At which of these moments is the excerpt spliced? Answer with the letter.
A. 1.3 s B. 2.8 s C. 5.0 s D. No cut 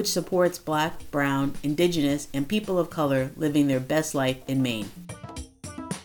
C